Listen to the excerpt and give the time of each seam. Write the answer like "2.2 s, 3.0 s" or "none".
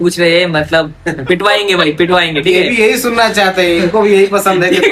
none